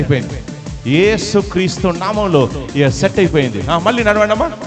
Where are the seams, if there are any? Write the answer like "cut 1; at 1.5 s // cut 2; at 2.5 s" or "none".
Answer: none